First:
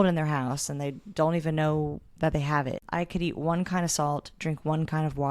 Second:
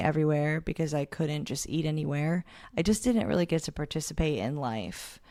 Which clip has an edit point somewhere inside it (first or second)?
first